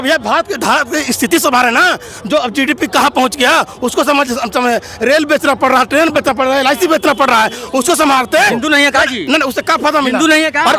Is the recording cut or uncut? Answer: cut